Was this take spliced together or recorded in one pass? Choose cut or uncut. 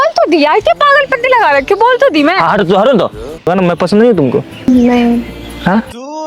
cut